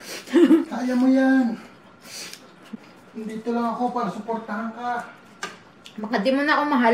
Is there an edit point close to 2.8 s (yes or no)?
yes